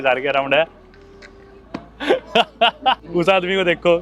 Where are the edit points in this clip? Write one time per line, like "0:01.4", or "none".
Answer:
0:03.0